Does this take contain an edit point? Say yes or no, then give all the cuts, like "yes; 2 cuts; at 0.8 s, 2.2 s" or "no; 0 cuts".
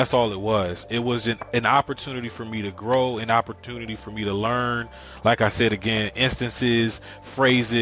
no; 0 cuts